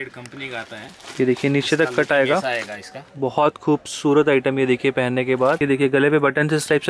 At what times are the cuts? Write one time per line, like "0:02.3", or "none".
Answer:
0:05.6